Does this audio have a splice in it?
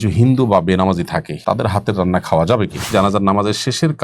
yes; 2 cuts; at 1.3 s, 2.9 s

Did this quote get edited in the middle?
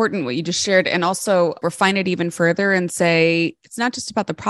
yes; 1 cut; at 1.6 s

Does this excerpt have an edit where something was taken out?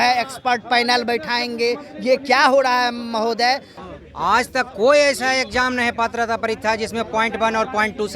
yes; 1 cut; at 3.8 s

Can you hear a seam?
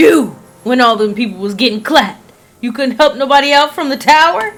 no; 0 cuts

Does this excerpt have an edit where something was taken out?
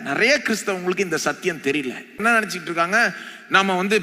yes; 1 cut; at 2.2 s

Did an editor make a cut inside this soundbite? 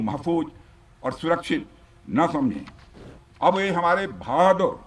no; 0 cuts

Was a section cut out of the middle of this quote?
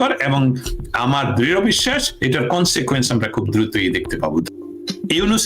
yes; 1 cut; at 4.5 s

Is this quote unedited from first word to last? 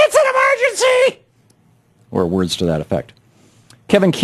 yes; 0 cuts

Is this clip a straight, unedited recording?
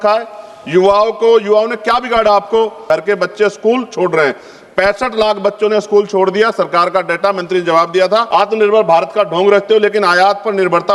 no; 2 cuts; at 2.8 s, 8.3 s

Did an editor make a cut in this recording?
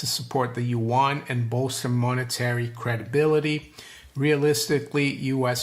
yes; 1 cut; at 3.6 s

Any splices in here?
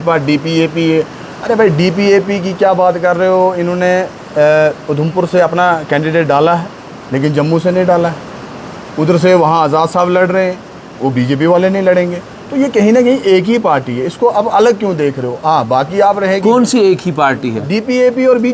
no; 0 cuts

